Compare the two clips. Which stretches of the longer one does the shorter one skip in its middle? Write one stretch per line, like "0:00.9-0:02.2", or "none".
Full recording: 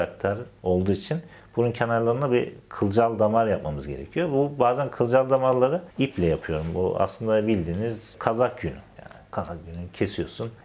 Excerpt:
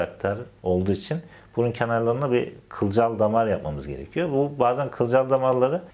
none